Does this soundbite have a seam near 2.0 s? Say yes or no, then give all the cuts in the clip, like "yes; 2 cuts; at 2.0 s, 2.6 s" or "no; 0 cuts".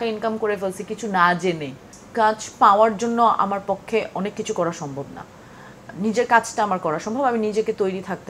yes; 1 cut; at 2.0 s